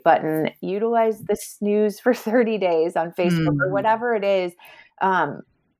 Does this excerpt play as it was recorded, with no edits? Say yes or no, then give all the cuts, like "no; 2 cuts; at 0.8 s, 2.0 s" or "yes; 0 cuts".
yes; 0 cuts